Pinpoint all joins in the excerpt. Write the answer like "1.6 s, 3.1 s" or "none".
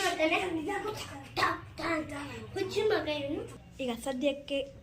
3.6 s